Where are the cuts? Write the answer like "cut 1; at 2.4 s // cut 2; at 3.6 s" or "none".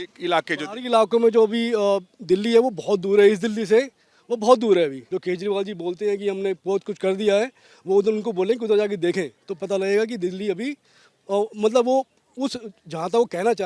cut 1; at 5.0 s